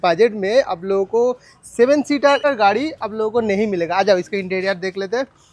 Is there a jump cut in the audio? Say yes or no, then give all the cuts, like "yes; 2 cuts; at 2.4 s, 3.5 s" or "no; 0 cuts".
yes; 1 cut; at 2.5 s